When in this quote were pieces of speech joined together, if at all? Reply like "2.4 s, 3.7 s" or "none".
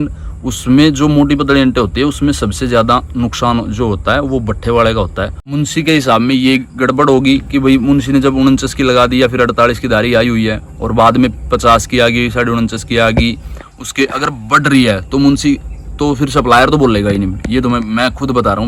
5.4 s